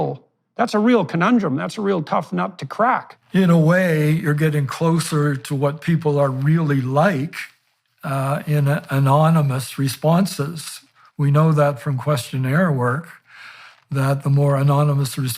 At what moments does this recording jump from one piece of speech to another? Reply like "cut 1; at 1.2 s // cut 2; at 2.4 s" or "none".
cut 1; at 3.1 s